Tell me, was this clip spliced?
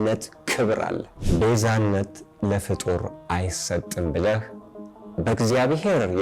yes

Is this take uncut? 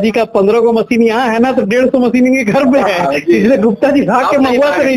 yes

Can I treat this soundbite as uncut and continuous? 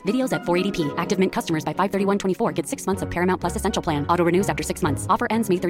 yes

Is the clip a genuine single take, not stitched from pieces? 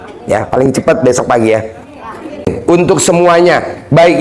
no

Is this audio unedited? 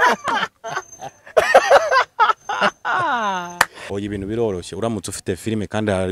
no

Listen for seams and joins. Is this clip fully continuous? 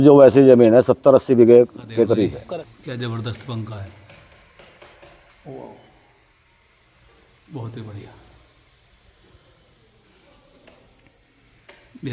no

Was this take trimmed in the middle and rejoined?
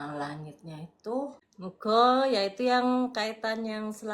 yes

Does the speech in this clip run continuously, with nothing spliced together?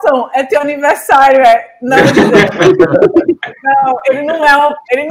yes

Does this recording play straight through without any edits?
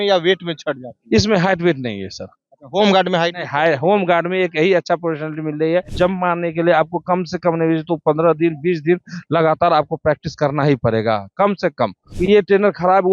no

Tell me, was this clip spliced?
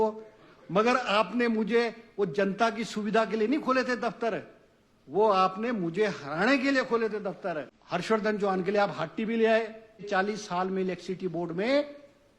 yes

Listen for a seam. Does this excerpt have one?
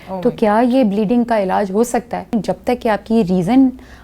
yes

